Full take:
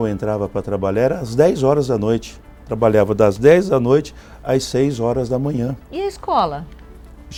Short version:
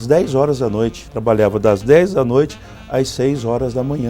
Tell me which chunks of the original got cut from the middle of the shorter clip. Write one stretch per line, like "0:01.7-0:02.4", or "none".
0:02.3-0:02.6